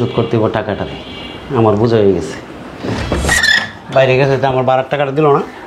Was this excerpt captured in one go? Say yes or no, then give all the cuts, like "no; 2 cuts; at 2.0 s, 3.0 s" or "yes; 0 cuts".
no; 1 cut; at 3.1 s